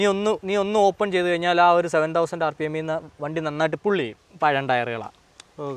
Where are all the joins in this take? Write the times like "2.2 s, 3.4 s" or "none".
4.1 s